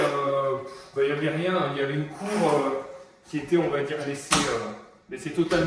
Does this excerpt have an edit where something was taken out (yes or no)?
no